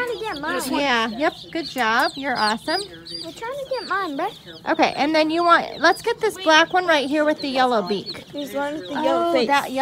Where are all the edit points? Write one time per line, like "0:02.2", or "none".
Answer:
none